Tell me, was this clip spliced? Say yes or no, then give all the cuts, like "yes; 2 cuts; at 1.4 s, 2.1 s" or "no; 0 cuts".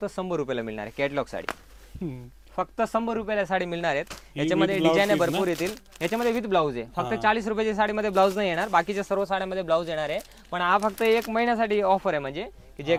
no; 0 cuts